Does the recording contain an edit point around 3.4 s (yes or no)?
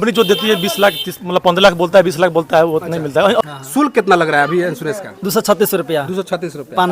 yes